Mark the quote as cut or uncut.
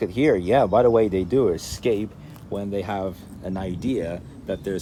uncut